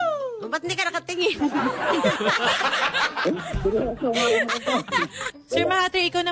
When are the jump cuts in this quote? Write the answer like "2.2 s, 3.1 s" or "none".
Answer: 5.3 s